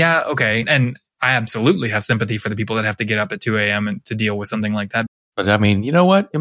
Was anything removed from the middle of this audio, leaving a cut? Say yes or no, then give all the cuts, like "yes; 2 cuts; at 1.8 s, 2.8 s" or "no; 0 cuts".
yes; 1 cut; at 5.1 s